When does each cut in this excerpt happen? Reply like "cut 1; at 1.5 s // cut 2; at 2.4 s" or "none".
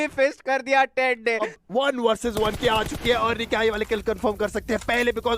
cut 1; at 1.5 s